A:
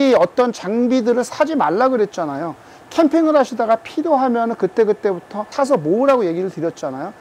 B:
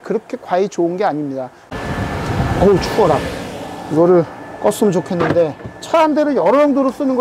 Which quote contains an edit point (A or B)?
B